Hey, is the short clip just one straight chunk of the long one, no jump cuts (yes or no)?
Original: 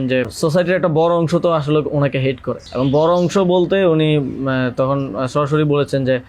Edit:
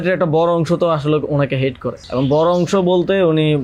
yes